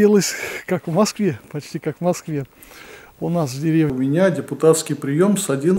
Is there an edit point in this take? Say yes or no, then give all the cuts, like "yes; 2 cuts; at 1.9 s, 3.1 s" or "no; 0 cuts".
yes; 1 cut; at 3.9 s